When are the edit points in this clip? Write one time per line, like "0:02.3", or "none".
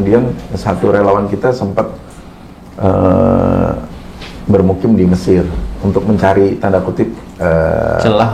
none